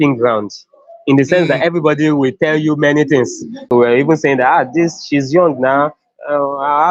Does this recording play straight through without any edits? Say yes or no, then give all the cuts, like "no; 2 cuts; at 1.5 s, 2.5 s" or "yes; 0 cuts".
no; 1 cut; at 3.6 s